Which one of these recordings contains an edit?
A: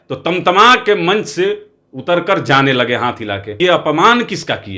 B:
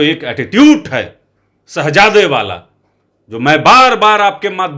A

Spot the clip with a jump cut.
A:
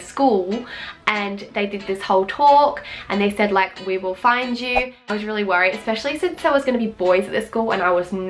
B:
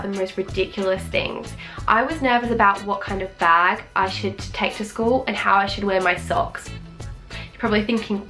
A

